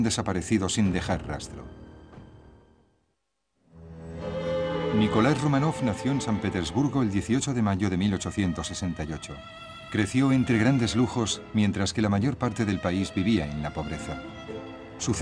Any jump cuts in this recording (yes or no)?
yes